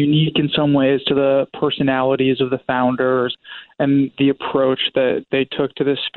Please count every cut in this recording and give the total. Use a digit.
2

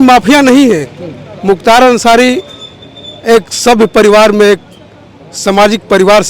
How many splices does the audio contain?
0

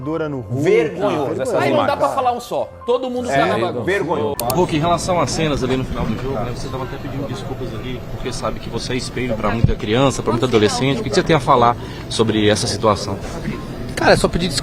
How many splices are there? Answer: 1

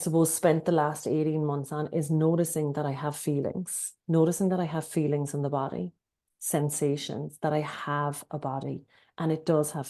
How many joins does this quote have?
0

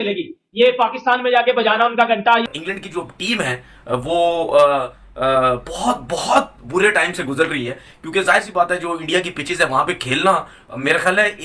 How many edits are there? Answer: 1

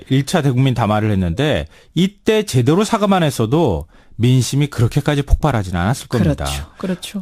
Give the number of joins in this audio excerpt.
0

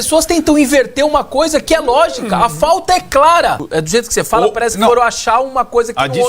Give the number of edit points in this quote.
1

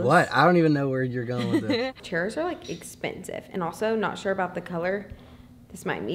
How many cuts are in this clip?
1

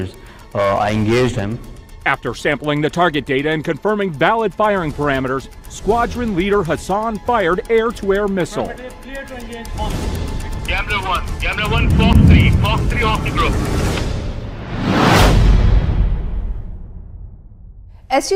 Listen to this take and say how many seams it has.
0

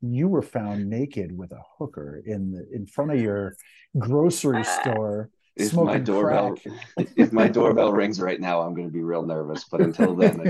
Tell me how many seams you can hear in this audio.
0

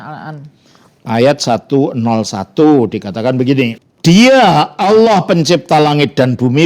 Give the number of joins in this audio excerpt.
1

